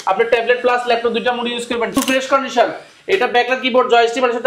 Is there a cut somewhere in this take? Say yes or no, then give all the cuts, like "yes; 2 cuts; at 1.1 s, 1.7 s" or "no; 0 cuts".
yes; 1 cut; at 2.0 s